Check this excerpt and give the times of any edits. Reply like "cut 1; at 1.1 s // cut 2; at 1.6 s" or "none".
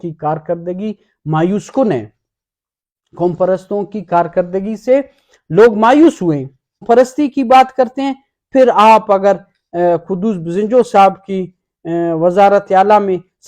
cut 1; at 6.8 s